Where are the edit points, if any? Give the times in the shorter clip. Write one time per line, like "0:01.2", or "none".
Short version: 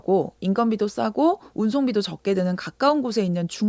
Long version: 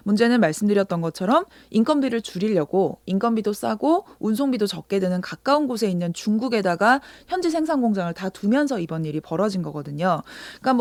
none